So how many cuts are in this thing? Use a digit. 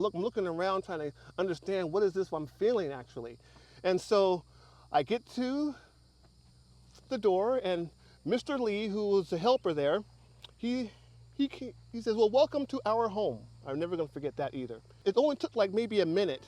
1